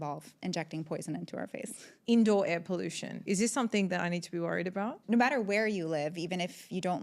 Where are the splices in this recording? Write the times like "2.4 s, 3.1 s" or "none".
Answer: 1.9 s, 3.2 s, 5.0 s